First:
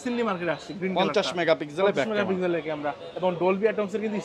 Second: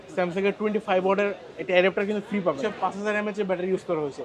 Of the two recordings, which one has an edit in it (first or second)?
second